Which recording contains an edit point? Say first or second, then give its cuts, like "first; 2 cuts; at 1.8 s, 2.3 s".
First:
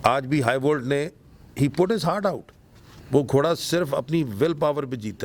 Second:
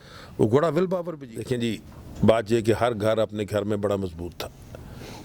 second; 1 cut; at 1.1 s